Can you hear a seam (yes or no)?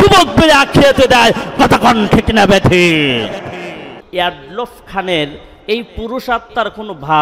yes